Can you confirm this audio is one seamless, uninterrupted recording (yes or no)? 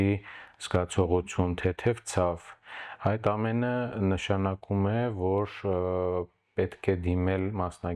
yes